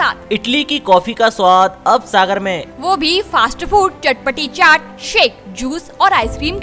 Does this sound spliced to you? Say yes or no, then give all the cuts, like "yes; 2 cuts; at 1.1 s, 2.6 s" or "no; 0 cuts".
no; 0 cuts